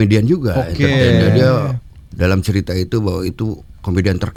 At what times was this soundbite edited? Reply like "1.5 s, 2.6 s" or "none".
none